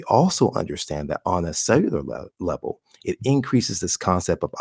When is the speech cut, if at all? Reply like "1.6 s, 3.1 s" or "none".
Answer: none